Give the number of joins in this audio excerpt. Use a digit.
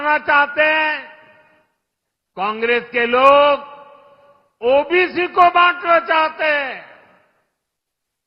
0